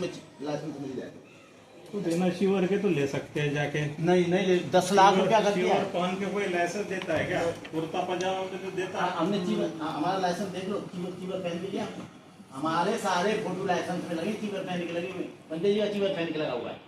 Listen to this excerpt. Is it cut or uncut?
uncut